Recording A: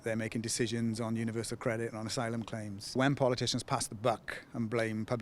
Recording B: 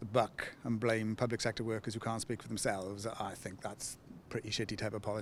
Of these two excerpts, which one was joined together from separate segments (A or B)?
A